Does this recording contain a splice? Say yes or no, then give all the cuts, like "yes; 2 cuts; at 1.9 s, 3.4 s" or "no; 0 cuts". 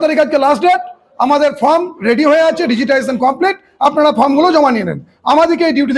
no; 0 cuts